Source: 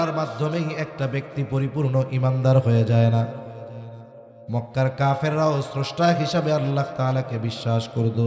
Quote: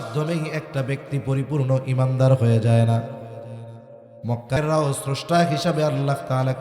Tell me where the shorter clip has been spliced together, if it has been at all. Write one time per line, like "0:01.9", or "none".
0:04.6